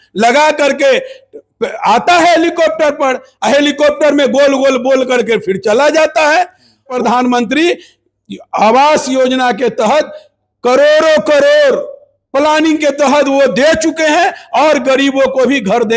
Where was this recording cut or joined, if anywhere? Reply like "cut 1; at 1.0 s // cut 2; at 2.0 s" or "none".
cut 1; at 6.9 s